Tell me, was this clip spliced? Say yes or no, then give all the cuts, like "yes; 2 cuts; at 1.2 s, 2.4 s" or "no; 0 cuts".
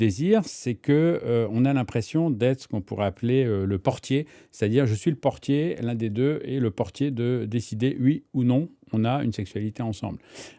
no; 0 cuts